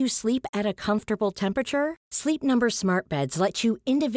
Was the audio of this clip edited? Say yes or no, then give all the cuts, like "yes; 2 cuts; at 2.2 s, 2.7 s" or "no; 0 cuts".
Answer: no; 0 cuts